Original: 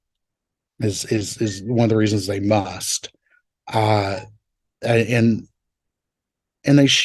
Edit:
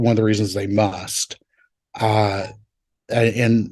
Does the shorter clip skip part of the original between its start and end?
no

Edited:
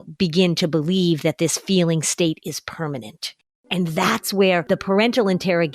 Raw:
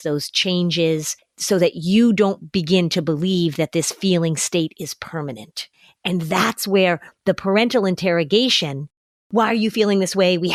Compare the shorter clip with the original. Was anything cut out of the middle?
yes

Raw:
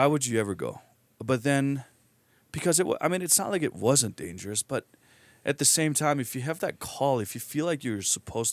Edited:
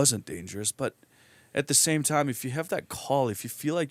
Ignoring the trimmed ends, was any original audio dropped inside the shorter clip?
no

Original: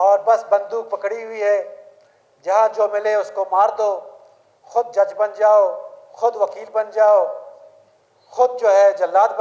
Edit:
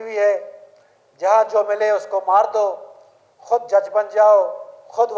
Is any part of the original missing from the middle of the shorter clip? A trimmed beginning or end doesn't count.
no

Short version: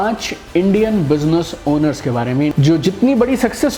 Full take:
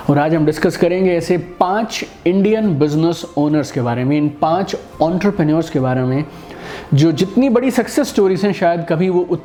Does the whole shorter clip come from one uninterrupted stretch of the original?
no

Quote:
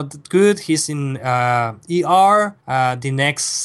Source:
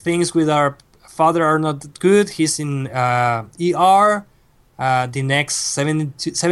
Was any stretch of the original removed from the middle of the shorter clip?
yes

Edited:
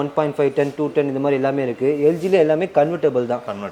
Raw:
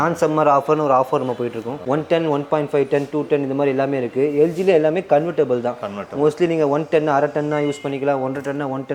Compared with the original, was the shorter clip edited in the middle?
no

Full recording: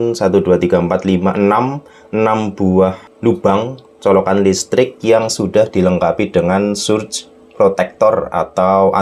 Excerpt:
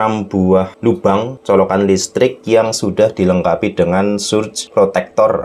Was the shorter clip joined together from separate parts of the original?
yes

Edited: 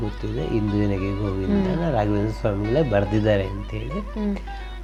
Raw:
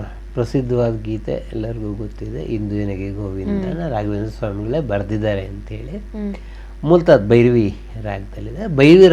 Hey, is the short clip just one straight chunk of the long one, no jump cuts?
yes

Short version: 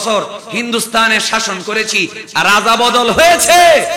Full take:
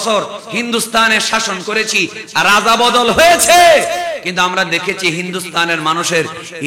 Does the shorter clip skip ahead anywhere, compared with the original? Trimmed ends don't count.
no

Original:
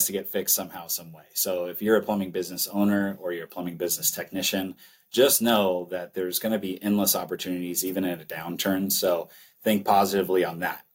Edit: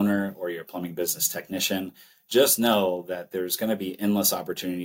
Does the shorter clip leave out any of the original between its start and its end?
no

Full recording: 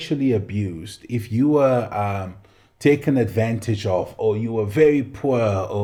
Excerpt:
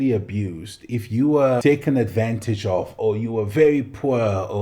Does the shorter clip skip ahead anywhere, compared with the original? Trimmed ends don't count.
yes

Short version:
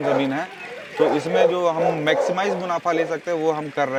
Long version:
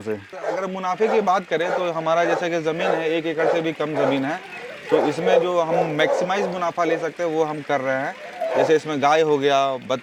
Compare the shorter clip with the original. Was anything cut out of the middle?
no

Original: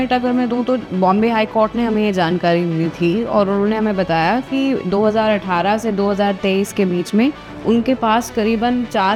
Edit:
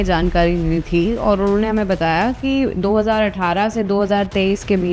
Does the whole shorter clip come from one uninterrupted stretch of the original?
yes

